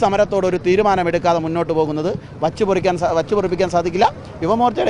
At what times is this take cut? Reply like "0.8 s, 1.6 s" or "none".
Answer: none